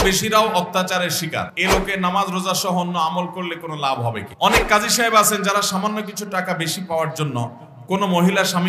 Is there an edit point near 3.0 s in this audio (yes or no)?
no